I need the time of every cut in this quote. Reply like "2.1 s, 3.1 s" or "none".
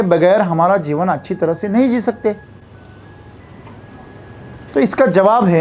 none